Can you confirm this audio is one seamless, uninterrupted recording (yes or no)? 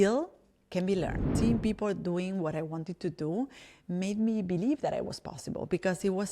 no